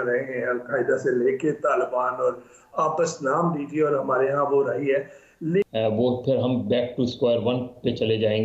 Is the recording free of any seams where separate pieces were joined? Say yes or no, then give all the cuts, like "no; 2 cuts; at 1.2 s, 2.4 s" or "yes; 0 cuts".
no; 1 cut; at 5.7 s